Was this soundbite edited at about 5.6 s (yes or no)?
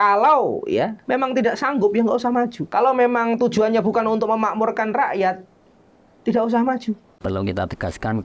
no